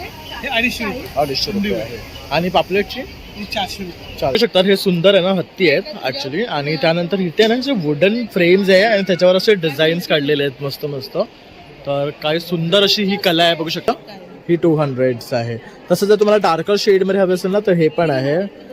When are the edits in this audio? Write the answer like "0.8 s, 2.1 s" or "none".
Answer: 4.3 s, 13.9 s